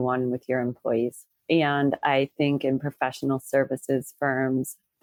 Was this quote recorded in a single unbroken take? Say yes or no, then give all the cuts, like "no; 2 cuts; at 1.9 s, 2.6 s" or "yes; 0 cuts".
yes; 0 cuts